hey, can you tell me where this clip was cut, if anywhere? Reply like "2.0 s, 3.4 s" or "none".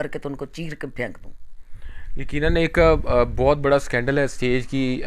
none